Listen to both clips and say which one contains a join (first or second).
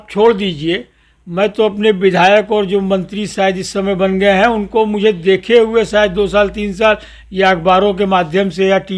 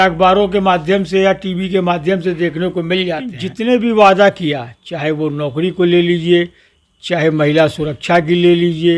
second